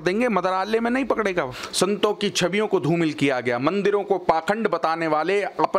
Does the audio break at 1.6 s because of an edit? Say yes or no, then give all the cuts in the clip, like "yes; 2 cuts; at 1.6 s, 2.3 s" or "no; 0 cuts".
yes; 1 cut; at 1.6 s